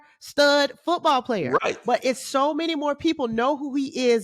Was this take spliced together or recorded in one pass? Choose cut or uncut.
uncut